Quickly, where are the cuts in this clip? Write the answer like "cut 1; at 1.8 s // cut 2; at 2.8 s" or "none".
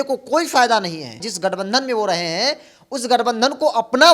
cut 1; at 1.2 s